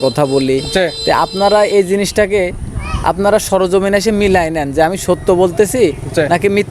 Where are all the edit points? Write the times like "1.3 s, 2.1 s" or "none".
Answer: none